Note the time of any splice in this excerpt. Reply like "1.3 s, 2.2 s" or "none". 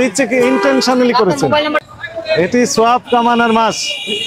1.8 s